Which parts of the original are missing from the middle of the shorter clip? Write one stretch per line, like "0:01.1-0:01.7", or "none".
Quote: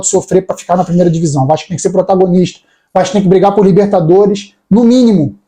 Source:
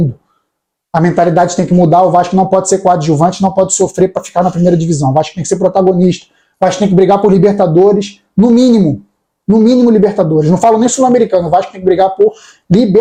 none